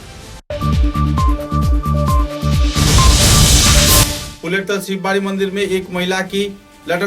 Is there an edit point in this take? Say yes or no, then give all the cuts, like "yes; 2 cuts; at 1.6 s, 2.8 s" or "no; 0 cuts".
yes; 1 cut; at 4.2 s